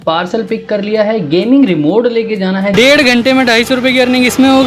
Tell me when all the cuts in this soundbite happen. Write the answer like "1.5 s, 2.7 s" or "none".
2.7 s